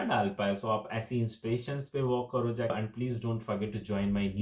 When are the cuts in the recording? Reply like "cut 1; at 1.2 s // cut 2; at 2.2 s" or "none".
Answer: cut 1; at 2.7 s